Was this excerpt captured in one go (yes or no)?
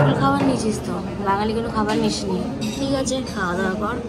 yes